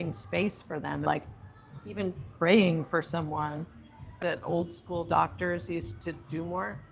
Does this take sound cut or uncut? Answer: cut